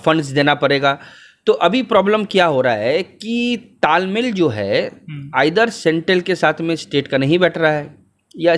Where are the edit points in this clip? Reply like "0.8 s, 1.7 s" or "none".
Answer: none

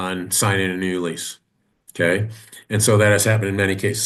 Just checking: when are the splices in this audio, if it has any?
none

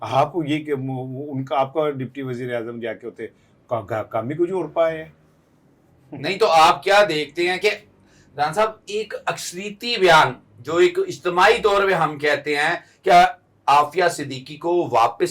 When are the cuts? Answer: none

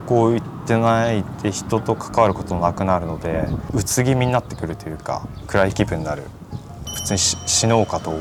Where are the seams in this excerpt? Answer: none

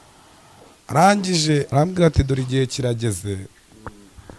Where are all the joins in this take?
1.7 s

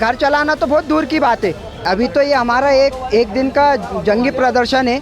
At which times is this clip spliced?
1.7 s

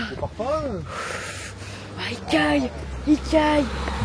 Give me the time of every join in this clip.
none

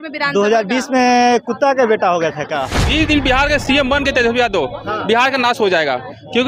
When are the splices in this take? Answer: 2.8 s

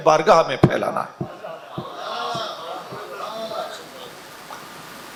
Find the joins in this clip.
none

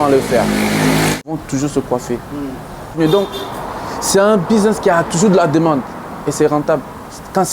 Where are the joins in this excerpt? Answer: 1.3 s, 2.9 s

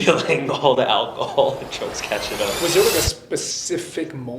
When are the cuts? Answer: 2.6 s, 3.5 s

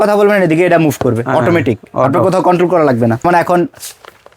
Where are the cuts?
3.2 s

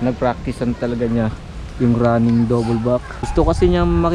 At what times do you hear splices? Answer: 3.2 s

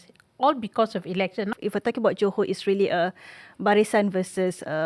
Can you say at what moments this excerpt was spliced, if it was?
1.5 s

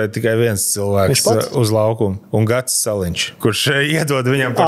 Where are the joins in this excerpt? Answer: 2.2 s, 3.2 s

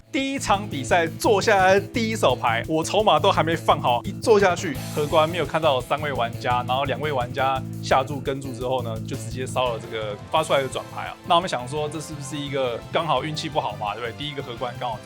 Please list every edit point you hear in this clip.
4.0 s, 4.8 s, 11.1 s

